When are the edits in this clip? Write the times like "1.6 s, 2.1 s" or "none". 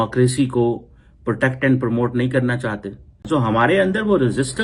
3.2 s